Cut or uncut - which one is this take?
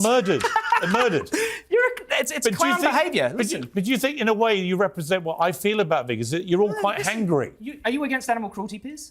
uncut